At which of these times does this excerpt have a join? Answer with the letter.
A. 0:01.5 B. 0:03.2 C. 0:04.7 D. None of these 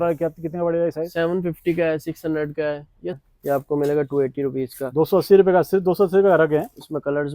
B